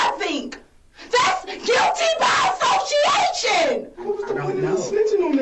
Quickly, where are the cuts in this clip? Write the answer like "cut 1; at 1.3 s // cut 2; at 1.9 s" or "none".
cut 1; at 4.1 s

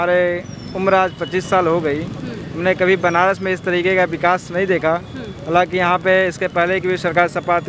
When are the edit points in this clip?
none

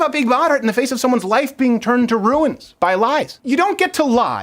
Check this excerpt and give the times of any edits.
cut 1; at 3.4 s

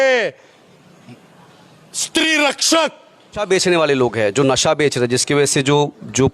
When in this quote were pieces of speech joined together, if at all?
cut 1; at 3.4 s

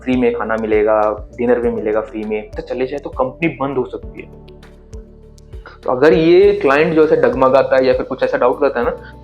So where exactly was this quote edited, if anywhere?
cut 1; at 2.6 s

